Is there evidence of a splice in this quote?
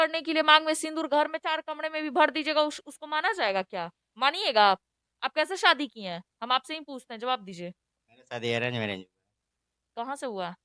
no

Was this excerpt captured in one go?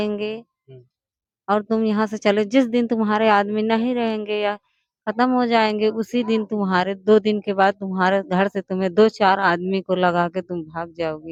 yes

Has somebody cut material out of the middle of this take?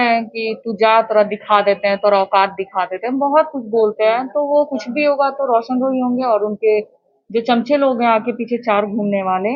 no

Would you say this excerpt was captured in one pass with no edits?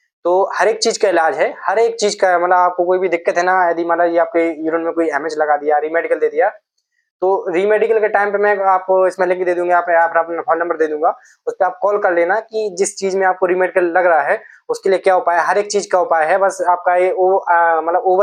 yes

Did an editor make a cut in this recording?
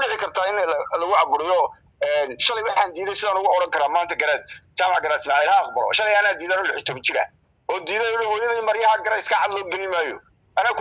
no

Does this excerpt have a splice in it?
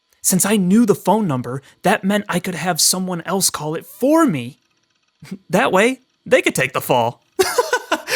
no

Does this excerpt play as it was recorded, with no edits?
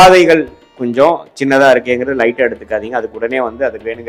yes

